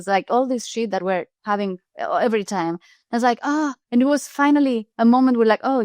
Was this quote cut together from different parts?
yes; 3 cuts; at 1.3 s, 3.8 s, 4.9 s

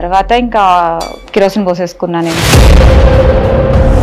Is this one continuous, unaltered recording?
no; 1 cut; at 1.2 s

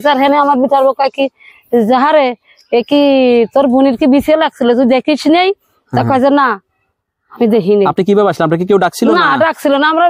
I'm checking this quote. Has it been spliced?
no; 0 cuts

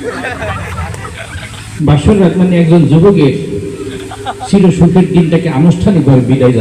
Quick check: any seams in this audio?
no; 0 cuts

